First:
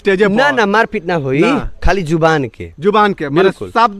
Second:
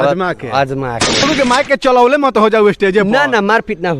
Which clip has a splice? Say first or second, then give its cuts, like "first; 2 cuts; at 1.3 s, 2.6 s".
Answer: second; 1 cut; at 1.2 s